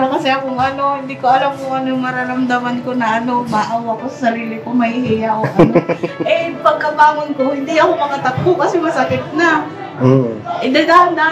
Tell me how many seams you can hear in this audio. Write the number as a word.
zero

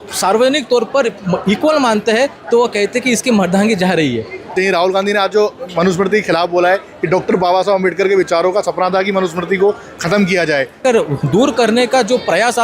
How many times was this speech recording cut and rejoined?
two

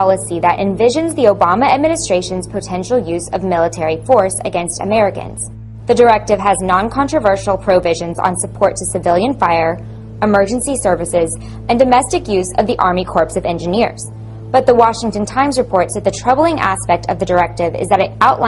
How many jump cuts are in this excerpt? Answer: one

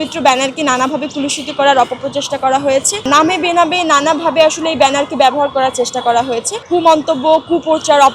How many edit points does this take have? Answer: two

